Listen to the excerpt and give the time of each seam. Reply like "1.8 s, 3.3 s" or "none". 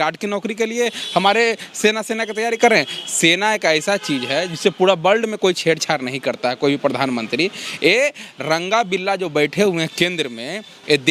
none